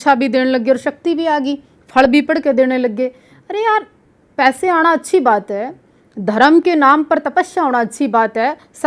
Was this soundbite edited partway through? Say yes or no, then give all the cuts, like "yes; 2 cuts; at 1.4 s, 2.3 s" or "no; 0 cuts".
no; 0 cuts